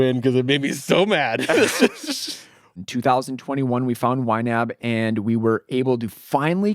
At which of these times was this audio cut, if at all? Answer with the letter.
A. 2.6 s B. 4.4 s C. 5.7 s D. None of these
A